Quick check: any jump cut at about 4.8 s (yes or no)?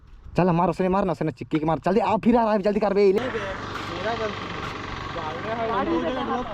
no